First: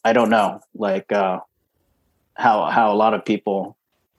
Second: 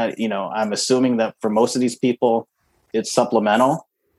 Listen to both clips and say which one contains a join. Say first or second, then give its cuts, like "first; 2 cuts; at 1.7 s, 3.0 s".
second; 1 cut; at 2.8 s